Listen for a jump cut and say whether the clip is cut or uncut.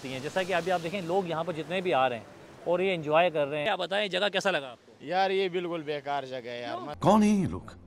cut